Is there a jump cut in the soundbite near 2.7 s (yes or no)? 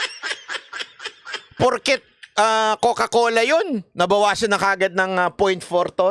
no